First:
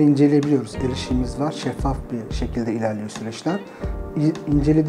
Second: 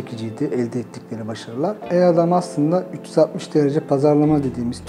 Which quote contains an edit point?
second; 1 cut; at 1.8 s

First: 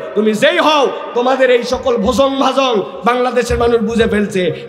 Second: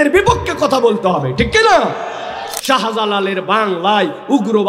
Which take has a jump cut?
second; 1 cut; at 2.5 s

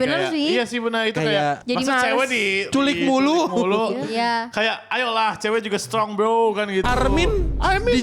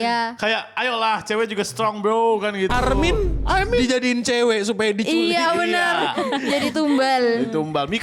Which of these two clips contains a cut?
first; 2 cuts; at 1.6 s, 2.7 s

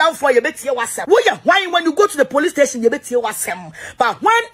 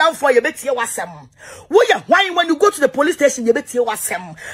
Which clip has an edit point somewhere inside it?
first; 1 cut; at 0.9 s

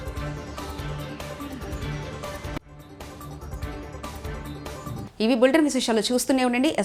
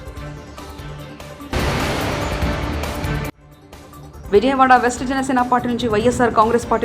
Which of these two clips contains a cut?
second; 2 cuts; at 1.5 s, 3.4 s

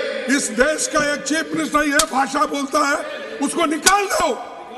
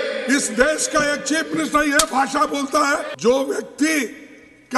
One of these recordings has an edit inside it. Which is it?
second; 1 cut; at 3.1 s

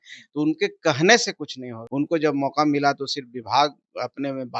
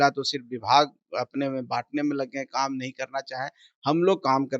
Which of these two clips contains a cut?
first; 1 cut; at 1.8 s

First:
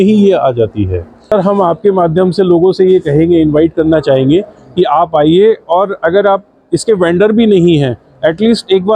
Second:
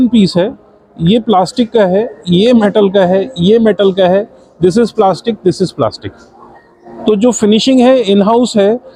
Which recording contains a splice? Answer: first; 1 cut; at 1.3 s

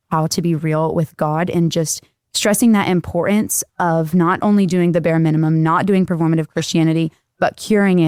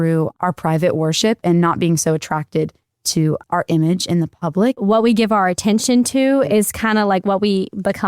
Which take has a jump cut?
second; 1 cut; at 4.8 s

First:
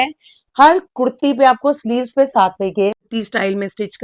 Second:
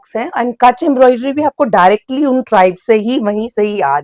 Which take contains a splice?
first; 1 cut; at 3.0 s

